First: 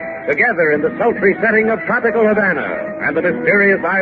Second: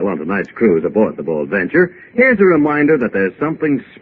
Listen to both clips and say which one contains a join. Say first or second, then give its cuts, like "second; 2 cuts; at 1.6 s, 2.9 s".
second; 1 cut; at 2.6 s